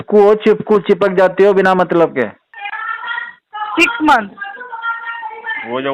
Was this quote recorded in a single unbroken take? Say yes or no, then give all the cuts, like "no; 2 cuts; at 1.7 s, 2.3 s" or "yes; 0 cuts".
no; 1 cut; at 2.5 s